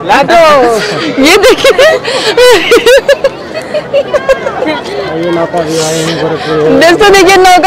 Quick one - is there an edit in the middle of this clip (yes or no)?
no